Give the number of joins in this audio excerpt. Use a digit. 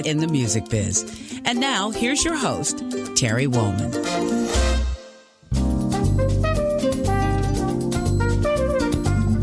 0